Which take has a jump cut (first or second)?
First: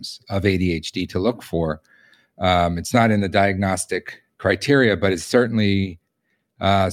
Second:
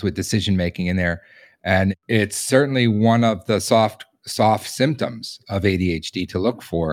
second